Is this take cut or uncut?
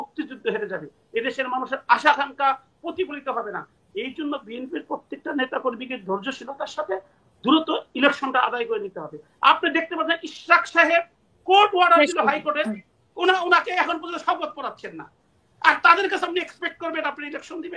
uncut